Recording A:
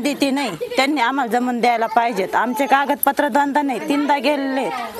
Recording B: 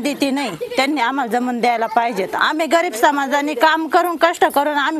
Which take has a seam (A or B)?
B